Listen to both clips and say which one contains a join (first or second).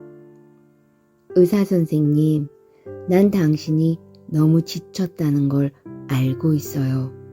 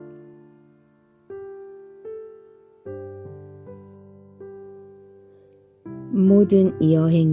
first